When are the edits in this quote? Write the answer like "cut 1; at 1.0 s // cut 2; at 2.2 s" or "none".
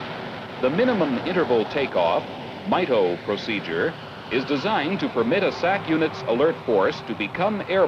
cut 1; at 4.6 s

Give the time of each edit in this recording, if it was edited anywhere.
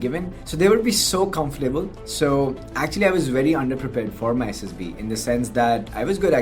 none

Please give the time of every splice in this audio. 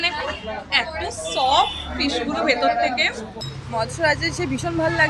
cut 1; at 3.5 s

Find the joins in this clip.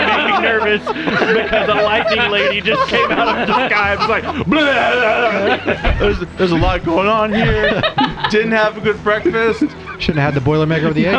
cut 1; at 9.8 s

